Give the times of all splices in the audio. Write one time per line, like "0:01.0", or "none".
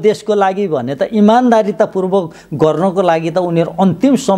none

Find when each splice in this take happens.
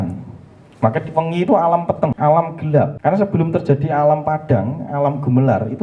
0:02.1
0:02.9

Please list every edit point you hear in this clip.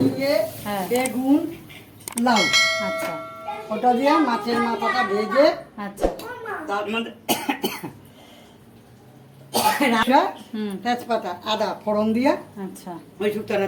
none

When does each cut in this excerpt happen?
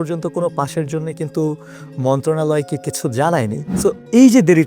0:03.7

